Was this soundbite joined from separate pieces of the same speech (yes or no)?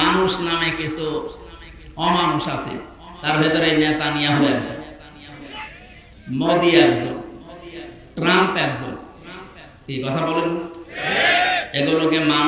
no